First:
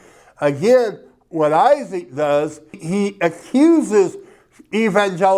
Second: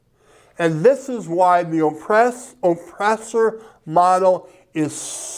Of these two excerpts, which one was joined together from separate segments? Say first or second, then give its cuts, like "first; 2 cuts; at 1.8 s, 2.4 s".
first; 1 cut; at 2.8 s